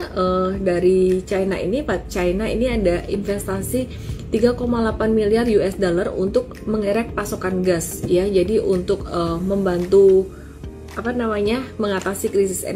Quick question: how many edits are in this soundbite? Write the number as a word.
zero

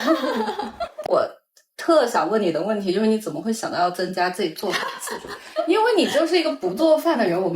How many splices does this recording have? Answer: one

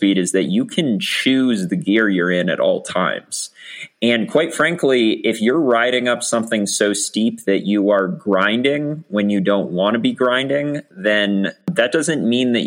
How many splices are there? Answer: one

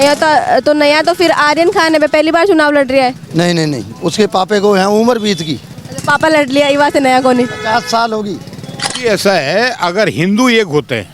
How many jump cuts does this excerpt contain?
one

